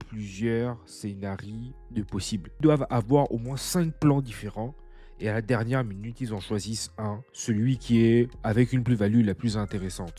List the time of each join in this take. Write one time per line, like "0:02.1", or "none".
none